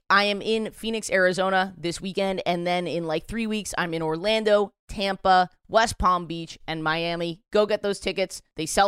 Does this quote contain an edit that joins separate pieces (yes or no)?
no